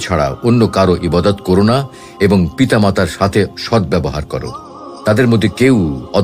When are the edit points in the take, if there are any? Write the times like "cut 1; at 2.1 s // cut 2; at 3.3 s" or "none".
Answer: none